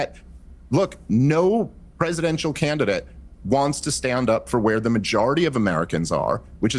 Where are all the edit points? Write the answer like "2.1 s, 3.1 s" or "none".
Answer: 4.0 s